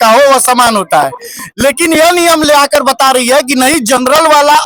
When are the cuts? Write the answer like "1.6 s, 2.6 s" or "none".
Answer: none